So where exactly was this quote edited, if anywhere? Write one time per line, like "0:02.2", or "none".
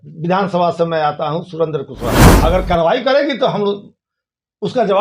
0:02.3